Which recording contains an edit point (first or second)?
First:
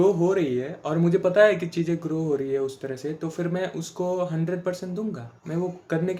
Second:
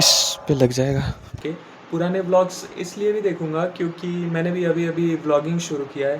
second